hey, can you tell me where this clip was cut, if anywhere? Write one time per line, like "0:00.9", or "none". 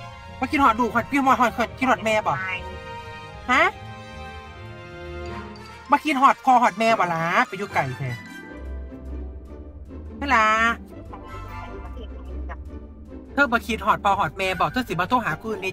0:04.0
0:05.9
0:08.2
0:10.1